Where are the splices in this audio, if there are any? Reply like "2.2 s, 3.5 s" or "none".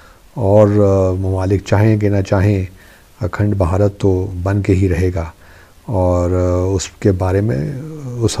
none